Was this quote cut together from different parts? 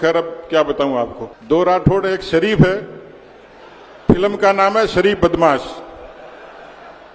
yes; 1 cut; at 1.3 s

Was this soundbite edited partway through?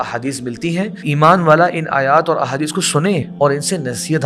yes; 2 cuts; at 1.0 s, 3.3 s

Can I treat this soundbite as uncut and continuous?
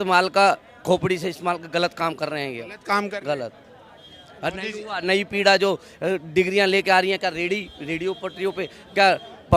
yes; 0 cuts

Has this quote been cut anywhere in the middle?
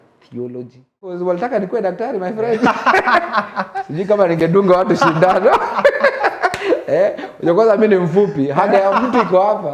yes; 1 cut; at 1.2 s

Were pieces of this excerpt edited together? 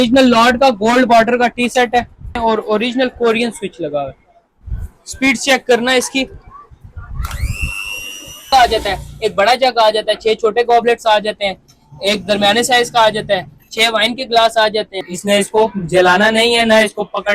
yes; 3 cuts; at 2.4 s, 8.5 s, 15.1 s

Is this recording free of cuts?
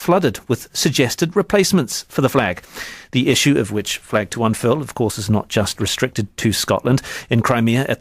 no; 1 cut; at 6.9 s

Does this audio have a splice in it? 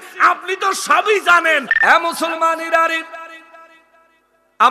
yes; 1 cut; at 1.7 s

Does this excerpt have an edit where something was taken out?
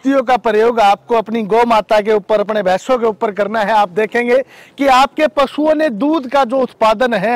no; 0 cuts

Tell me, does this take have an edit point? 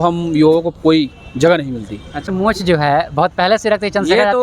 yes; 1 cut; at 2.3 s

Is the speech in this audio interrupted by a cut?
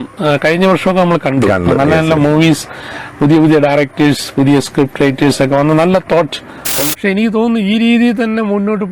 yes; 1 cut; at 6.8 s

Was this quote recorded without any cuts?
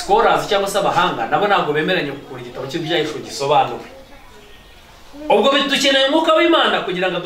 yes; 0 cuts

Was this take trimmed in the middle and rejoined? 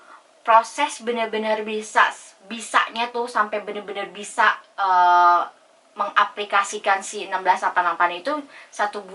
no; 0 cuts

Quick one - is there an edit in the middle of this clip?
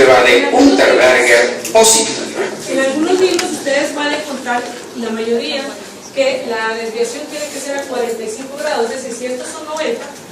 no; 0 cuts

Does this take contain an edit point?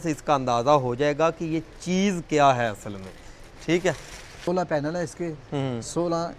yes; 1 cut; at 4.5 s

